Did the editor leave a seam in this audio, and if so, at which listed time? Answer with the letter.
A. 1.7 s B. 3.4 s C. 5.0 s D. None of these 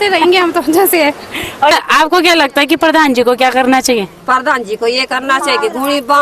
A